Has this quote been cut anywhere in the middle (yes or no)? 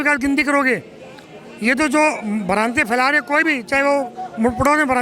no